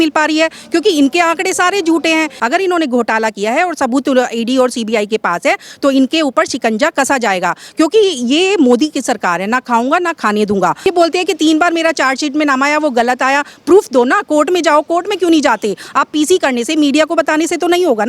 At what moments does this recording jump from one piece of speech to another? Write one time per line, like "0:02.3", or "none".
0:02.3
0:10.9